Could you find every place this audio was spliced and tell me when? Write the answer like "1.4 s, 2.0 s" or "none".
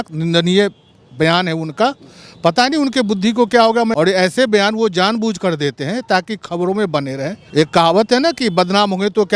3.9 s, 7.4 s

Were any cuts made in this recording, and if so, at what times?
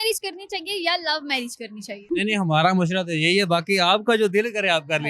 2.0 s

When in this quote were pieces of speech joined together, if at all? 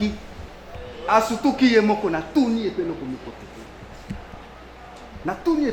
none

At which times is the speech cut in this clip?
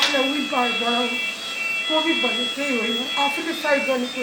none

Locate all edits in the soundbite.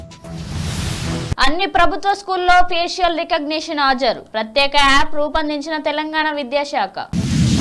1.3 s

